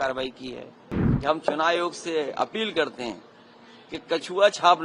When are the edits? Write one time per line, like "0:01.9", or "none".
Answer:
0:01.0